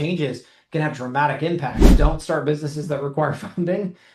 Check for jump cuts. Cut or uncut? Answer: cut